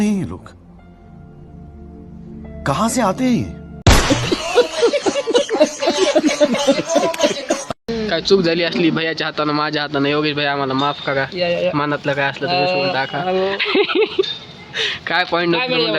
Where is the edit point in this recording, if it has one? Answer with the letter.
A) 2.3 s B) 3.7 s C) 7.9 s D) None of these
C